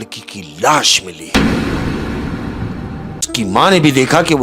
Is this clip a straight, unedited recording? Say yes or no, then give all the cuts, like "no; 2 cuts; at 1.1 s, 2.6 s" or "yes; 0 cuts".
no; 1 cut; at 3.3 s